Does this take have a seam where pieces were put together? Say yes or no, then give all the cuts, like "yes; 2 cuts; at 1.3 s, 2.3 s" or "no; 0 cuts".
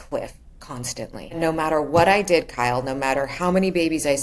yes; 1 cut; at 1.4 s